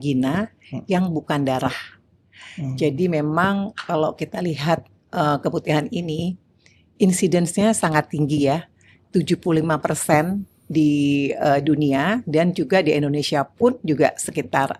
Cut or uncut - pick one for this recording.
uncut